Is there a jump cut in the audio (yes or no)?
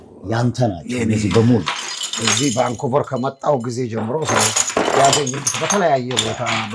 no